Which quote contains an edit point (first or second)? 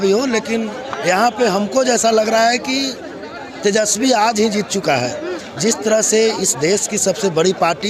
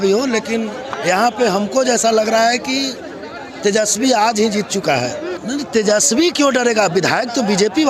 second